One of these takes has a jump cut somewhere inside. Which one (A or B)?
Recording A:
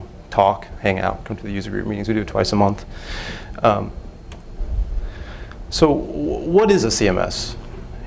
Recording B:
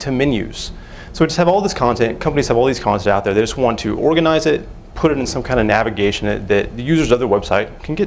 A